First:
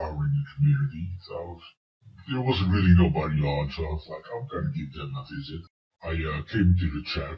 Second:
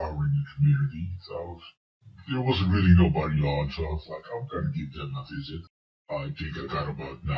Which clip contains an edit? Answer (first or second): second